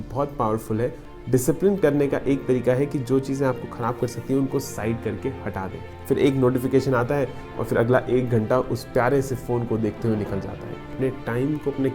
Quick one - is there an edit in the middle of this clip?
yes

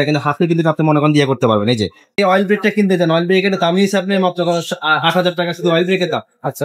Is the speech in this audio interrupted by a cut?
yes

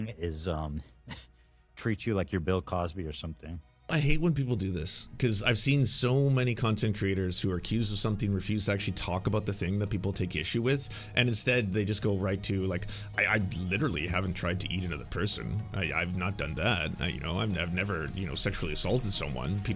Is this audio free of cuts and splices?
no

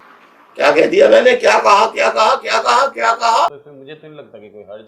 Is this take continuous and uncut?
yes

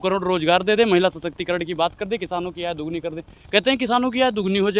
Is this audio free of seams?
yes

